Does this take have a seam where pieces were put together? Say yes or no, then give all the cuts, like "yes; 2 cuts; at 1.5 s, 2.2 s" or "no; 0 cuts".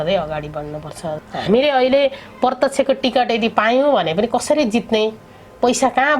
yes; 1 cut; at 1.2 s